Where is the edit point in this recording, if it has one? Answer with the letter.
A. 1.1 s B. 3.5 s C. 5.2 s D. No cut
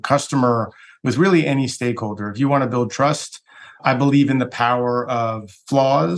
D